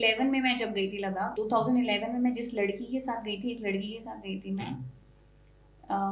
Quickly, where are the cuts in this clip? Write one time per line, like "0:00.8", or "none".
0:01.3